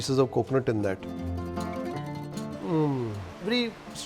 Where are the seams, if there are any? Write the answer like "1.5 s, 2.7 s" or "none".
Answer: 1.0 s